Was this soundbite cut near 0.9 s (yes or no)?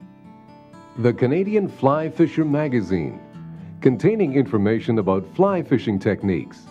yes